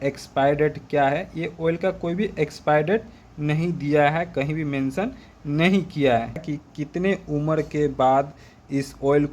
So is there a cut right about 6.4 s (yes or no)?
yes